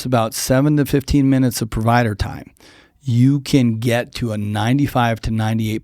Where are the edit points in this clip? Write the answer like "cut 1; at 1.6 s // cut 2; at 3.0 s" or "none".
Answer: none